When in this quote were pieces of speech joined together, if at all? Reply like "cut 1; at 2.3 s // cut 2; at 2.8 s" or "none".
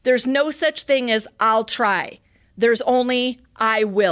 none